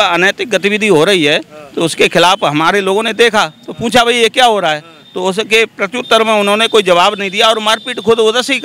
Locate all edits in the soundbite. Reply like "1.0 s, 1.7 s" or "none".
none